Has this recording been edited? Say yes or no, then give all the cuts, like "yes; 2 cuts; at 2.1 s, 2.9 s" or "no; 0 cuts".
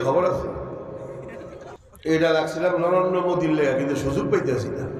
yes; 1 cut; at 1.8 s